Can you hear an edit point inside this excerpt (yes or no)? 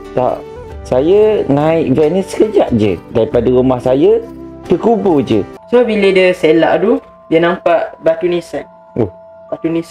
yes